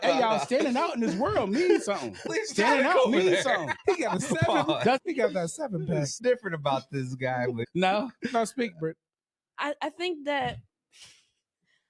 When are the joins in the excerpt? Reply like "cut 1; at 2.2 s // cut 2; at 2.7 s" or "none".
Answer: cut 1; at 2.3 s // cut 2; at 3.7 s // cut 3; at 5.0 s // cut 4; at 6.2 s // cut 5; at 7.6 s